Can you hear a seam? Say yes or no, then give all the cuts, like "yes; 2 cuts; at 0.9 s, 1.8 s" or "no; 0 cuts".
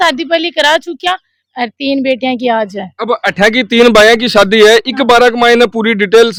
no; 0 cuts